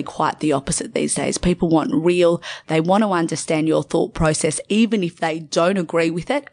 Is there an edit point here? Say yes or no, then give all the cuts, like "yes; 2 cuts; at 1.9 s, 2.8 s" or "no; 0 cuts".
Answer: yes; 1 cut; at 2.5 s